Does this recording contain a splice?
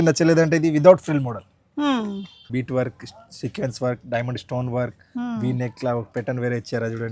yes; 1 cut; at 2.5 s

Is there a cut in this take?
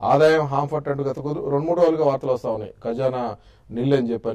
no; 0 cuts

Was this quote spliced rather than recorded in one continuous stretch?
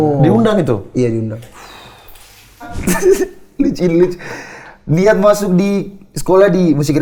yes; 1 cut; at 2.8 s

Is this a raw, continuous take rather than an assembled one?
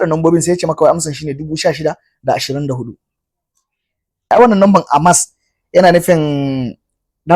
no; 1 cut; at 4.3 s

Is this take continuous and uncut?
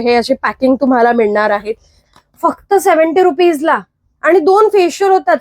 no; 1 cut; at 2.1 s

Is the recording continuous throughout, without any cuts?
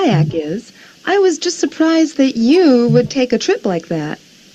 yes; 0 cuts

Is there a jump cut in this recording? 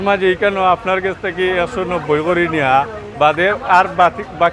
no; 0 cuts

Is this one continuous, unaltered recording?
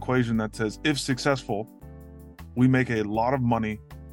yes; 0 cuts

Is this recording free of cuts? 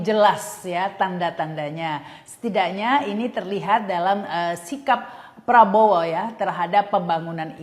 yes; 0 cuts

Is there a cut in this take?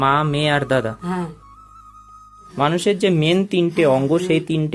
yes; 1 cut; at 2.4 s

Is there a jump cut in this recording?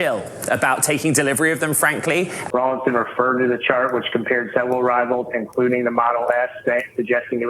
yes; 1 cut; at 2.4 s

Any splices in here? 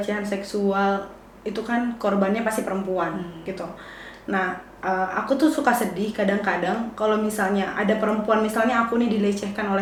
no; 0 cuts

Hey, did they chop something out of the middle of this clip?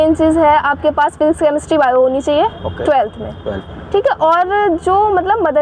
no; 0 cuts

